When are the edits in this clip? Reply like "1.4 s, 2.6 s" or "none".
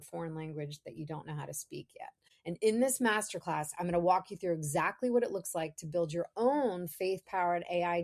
2.3 s